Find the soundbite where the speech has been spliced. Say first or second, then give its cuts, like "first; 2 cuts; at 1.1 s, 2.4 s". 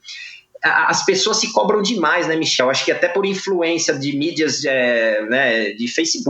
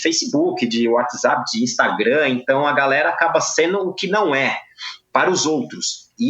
first; 1 cut; at 2.6 s